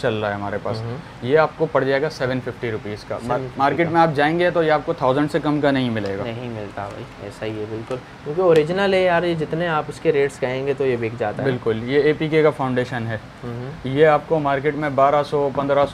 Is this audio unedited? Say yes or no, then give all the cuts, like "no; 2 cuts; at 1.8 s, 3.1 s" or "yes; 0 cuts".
yes; 0 cuts